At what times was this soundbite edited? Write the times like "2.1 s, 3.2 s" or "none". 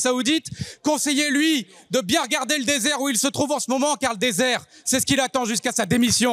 none